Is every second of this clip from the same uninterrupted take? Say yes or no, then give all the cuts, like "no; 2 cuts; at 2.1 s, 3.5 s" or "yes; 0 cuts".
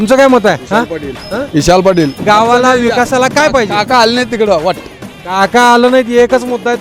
no; 1 cut; at 2.2 s